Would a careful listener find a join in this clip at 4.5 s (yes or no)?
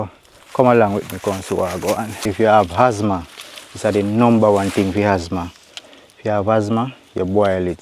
no